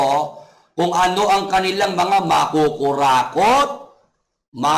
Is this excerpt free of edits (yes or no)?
yes